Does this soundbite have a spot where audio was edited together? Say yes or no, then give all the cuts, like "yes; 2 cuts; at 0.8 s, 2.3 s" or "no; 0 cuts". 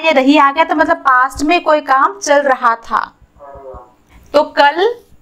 no; 0 cuts